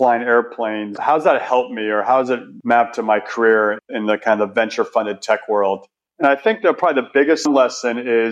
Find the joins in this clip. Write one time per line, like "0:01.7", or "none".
0:01.0
0:07.4